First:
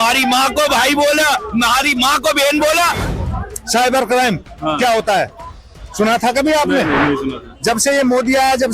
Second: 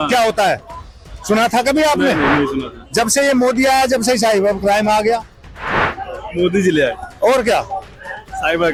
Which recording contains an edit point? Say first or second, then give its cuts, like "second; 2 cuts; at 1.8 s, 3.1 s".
first; 1 cut; at 3.1 s